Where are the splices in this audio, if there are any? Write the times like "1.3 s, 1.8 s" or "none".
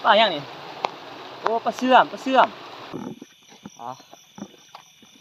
2.9 s